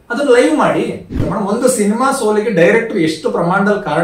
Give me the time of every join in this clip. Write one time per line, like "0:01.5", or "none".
0:01.2